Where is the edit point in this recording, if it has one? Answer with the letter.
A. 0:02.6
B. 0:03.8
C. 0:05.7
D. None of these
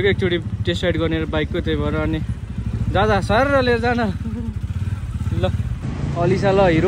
C